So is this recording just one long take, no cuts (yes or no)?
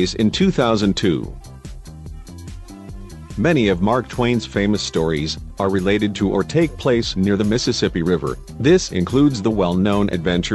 yes